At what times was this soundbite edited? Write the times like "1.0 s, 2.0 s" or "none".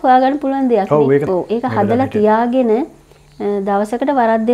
1.3 s